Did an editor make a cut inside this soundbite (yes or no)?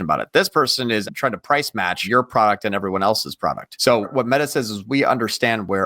yes